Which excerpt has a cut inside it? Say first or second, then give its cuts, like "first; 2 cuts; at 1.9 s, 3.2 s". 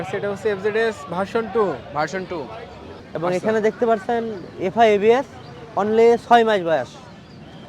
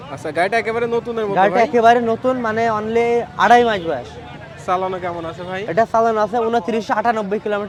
first; 1 cut; at 2.9 s